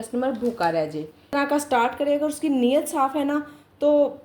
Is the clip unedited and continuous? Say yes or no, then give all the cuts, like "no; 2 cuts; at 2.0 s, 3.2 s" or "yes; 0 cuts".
no; 1 cut; at 1.3 s